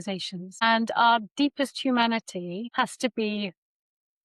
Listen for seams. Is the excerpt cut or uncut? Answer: uncut